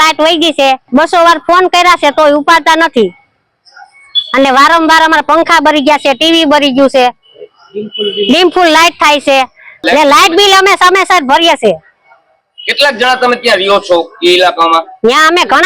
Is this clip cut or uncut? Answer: uncut